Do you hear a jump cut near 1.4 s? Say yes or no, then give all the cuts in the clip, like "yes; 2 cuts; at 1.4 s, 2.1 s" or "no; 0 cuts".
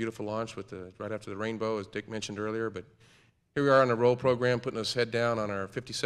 no; 1 cut; at 3.6 s